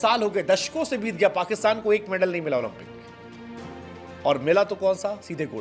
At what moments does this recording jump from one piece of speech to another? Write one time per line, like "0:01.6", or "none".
none